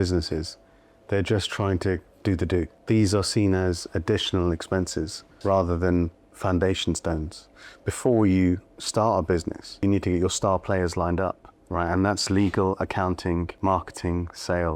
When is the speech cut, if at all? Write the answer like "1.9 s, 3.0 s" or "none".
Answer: 2.7 s, 5.3 s, 7.4 s, 9.8 s, 11.5 s, 13.5 s